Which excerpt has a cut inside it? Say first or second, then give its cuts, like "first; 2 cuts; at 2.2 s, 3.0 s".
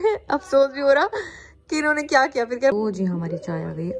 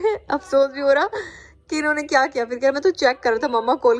first; 1 cut; at 2.7 s